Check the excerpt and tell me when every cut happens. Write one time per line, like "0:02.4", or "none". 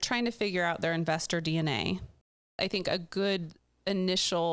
0:02.5